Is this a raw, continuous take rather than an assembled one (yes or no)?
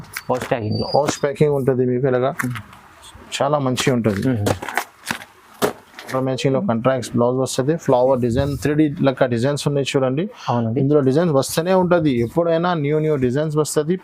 no